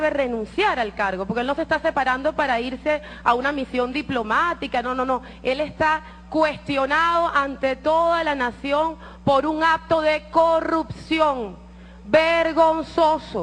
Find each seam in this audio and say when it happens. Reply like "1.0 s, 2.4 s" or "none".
none